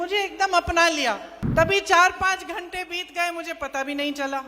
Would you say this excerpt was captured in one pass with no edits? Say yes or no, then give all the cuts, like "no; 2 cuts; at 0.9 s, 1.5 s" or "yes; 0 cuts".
no; 1 cut; at 1.3 s